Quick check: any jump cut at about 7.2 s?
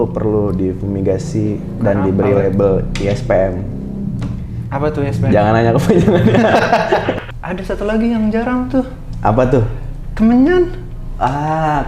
yes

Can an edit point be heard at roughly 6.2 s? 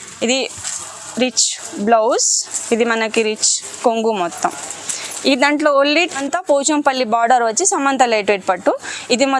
yes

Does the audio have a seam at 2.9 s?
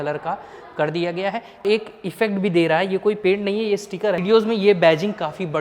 no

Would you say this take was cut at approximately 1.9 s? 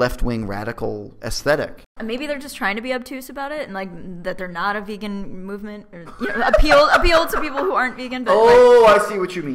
yes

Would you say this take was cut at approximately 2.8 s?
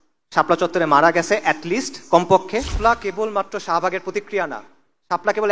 yes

